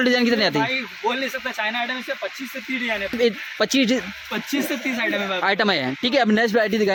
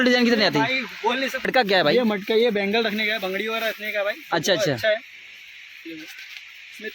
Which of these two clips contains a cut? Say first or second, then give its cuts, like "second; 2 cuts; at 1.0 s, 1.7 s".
second; 1 cut; at 1.5 s